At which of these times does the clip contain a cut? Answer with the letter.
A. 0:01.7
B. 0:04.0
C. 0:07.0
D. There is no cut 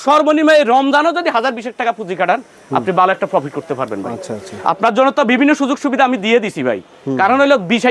D